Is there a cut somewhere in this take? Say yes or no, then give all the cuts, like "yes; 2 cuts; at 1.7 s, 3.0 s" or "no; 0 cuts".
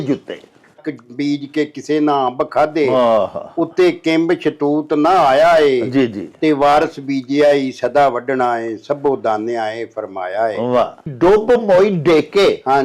yes; 2 cuts; at 0.9 s, 11.1 s